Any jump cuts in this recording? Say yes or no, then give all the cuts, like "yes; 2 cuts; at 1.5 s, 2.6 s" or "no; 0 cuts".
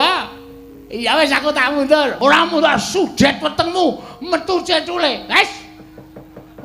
yes; 1 cut; at 2.2 s